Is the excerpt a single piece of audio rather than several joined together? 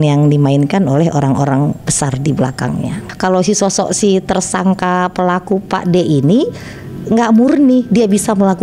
yes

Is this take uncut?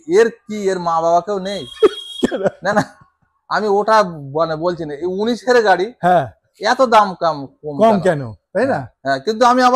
yes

